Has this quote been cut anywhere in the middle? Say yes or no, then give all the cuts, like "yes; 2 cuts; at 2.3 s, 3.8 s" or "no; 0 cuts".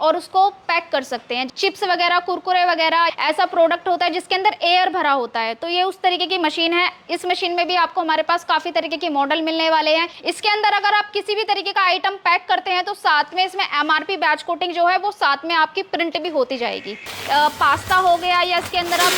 yes; 4 cuts; at 1.4 s, 3.1 s, 10.2 s, 17.1 s